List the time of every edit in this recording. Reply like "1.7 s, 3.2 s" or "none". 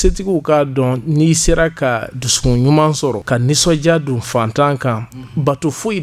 3.2 s